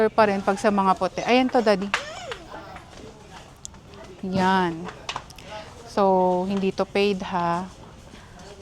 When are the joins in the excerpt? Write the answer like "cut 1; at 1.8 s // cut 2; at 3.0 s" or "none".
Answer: none